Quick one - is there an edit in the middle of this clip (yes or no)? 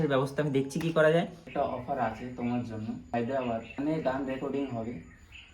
yes